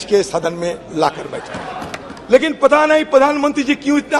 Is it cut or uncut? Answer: cut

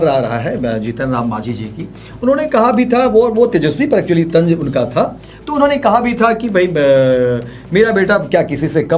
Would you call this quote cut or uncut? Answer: uncut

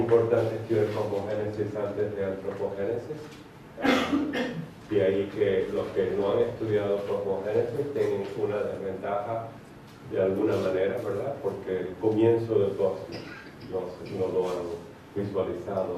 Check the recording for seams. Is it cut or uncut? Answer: uncut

